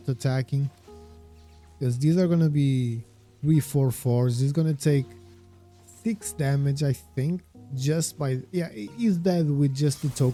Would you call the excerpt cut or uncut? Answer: uncut